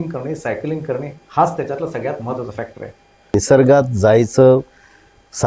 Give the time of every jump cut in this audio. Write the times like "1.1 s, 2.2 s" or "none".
3.3 s